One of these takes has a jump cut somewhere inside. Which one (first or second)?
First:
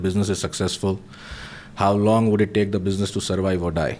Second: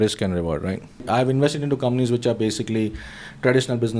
second